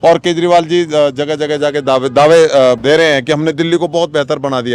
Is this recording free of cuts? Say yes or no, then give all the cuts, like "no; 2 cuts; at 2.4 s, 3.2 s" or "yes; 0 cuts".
no; 1 cut; at 2.8 s